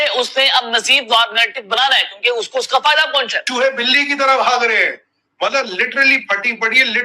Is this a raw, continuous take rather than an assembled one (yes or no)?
no